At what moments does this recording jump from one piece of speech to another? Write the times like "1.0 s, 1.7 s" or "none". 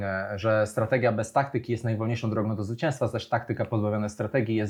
none